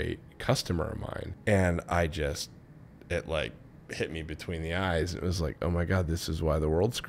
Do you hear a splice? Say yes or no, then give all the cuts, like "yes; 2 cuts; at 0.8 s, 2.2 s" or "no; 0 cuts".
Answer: yes; 1 cut; at 1.3 s